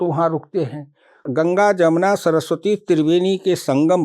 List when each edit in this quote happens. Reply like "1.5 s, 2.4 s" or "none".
1.2 s